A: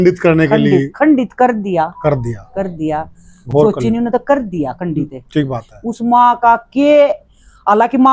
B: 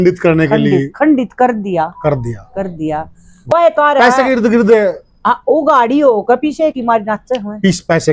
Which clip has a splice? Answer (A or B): B